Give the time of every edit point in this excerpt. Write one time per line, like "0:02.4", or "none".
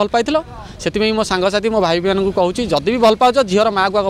none